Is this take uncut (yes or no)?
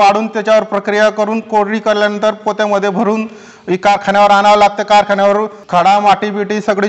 no